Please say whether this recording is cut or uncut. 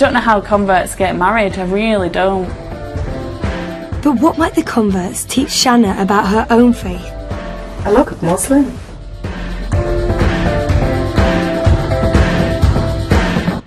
cut